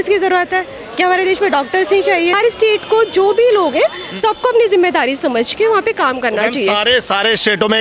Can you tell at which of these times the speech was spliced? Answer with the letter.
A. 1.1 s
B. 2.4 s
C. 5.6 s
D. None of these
B